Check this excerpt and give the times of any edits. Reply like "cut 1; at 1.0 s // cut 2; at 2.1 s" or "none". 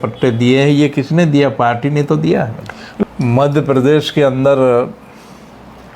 cut 1; at 3.0 s